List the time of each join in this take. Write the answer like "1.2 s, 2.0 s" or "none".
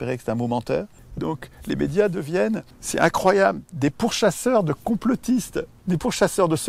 1.0 s, 2.8 s, 5.7 s